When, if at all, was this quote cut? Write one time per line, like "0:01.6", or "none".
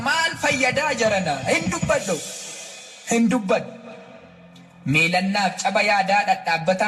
none